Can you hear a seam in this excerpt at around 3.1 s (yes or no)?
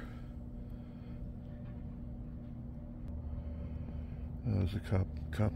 yes